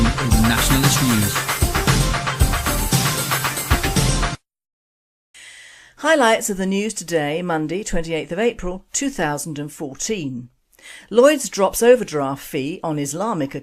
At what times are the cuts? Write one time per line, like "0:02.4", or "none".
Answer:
0:12.4